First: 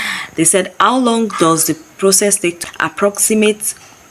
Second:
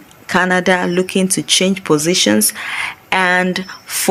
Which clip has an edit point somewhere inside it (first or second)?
first